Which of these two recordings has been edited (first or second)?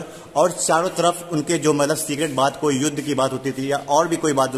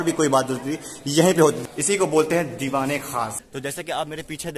second